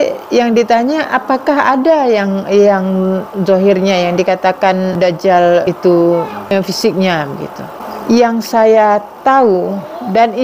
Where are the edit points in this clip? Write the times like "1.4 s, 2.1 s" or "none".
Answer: 5.7 s, 6.5 s